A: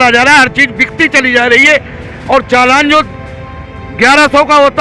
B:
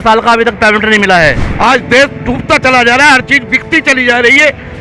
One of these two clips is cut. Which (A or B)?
B